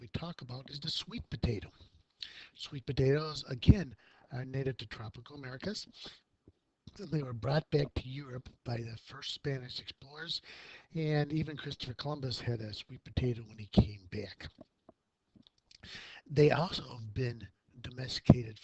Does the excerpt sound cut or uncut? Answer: uncut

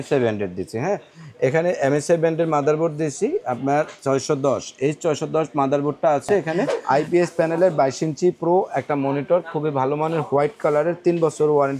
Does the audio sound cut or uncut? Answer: cut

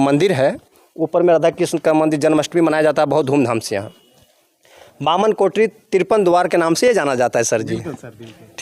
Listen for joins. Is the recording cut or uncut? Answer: uncut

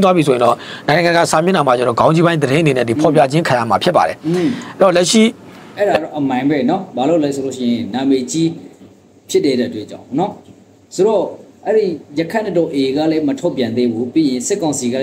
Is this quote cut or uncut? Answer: uncut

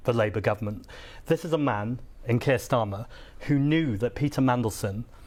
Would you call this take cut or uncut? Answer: uncut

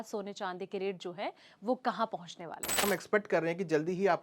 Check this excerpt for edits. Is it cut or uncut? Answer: cut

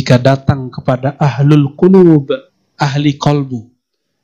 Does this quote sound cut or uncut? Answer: uncut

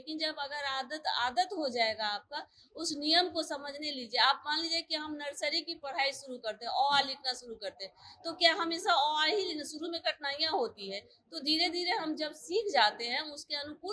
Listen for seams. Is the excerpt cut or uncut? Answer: uncut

